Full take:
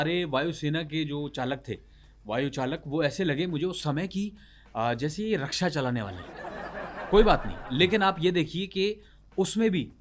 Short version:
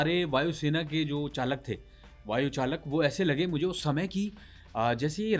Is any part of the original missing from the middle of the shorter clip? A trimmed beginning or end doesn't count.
no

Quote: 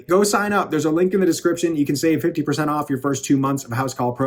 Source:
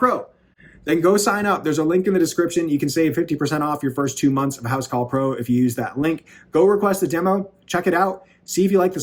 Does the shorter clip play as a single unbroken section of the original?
yes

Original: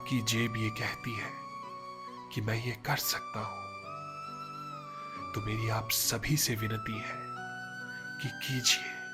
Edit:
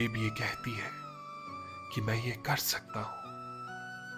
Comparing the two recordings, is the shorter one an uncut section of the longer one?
no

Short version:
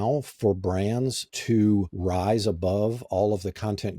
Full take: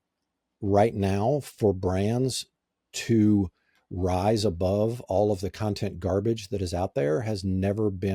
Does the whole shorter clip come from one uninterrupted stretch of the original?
no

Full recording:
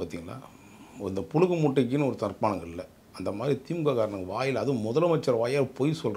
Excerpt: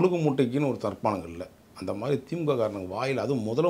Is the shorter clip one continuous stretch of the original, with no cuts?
yes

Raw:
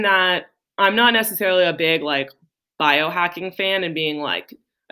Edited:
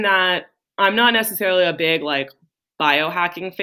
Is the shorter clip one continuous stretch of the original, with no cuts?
yes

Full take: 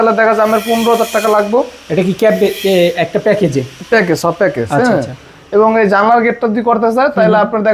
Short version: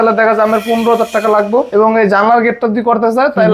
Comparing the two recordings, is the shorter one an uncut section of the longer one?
no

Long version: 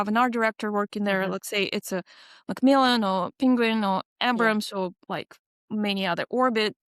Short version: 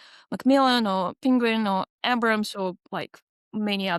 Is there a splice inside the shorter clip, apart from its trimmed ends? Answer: no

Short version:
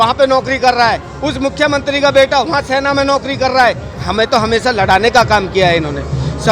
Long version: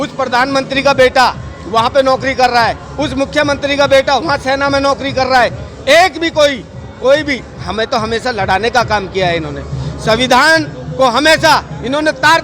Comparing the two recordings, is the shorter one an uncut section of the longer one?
no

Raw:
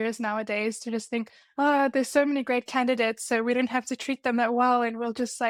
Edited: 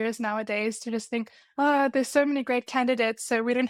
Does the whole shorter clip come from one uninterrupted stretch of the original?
yes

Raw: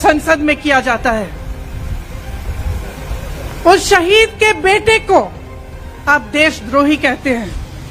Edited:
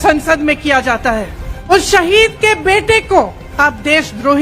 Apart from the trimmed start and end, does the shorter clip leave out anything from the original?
yes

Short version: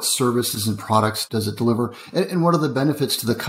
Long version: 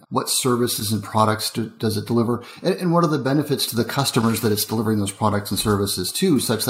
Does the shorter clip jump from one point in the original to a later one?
yes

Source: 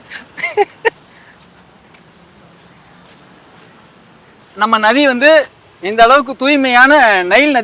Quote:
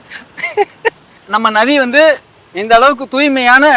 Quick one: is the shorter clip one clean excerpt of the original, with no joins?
no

